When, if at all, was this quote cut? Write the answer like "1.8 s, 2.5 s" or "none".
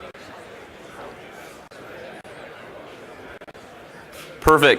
1.5 s